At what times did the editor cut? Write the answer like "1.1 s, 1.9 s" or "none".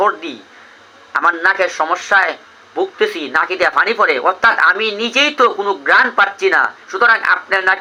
none